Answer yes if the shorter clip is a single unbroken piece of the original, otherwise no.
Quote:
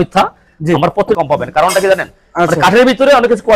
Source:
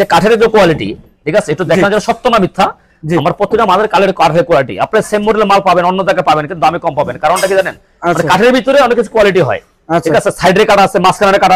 no